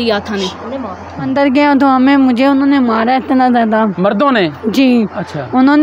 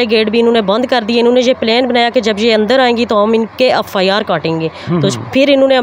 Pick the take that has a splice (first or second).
first